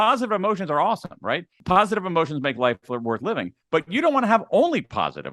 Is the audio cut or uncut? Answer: cut